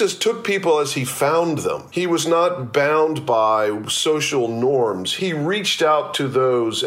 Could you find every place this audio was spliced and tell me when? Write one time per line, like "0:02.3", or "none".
0:01.8
0:05.1